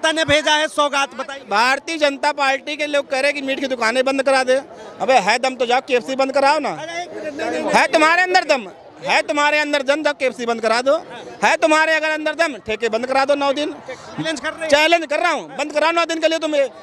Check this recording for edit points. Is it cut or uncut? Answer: cut